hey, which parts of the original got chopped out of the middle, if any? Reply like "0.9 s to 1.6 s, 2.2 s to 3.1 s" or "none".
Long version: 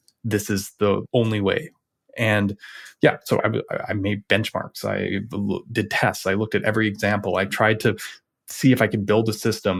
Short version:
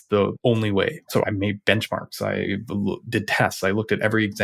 1.9 s to 3.9 s